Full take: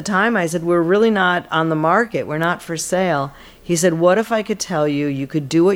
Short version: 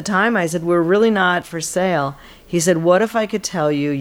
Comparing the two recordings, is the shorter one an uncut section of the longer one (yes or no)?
no